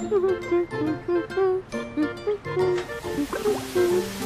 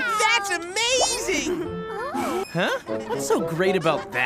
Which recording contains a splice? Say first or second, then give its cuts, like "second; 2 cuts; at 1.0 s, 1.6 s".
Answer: second; 1 cut; at 2.4 s